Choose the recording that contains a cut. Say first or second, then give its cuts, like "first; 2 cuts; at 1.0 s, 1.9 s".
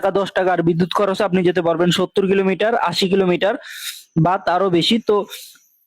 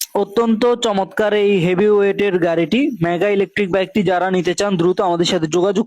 first; 1 cut; at 2.3 s